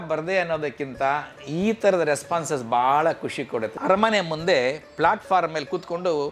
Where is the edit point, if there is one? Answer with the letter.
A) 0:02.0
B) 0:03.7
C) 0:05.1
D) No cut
B